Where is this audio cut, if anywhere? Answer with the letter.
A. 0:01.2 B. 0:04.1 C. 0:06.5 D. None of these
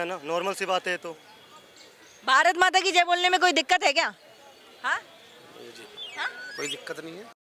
D